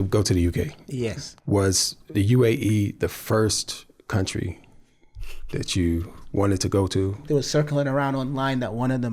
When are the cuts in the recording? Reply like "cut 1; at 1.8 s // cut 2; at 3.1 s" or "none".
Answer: cut 1; at 1.5 s // cut 2; at 7.2 s